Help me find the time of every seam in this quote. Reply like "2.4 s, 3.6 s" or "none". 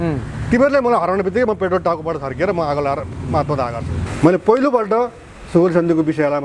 4.0 s